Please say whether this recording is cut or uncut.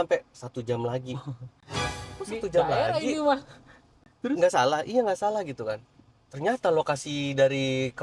uncut